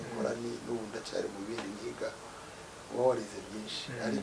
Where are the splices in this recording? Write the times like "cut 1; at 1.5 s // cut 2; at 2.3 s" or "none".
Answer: none